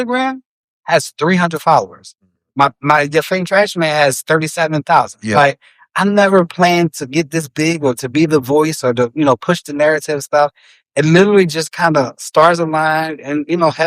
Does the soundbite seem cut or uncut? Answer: uncut